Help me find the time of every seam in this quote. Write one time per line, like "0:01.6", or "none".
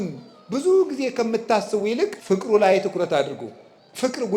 0:02.2